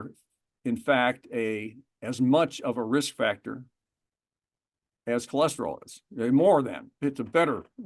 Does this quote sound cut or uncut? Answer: cut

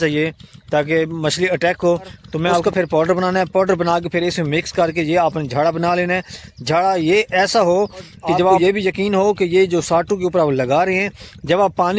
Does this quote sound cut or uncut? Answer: cut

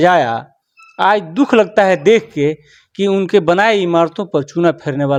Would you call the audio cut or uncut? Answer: uncut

